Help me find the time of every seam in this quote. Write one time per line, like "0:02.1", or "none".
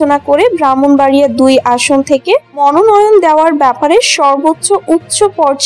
0:02.6